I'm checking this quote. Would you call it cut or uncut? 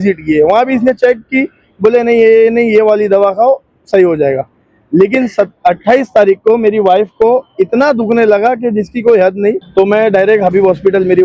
cut